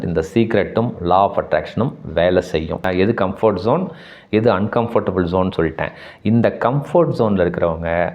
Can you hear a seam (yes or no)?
yes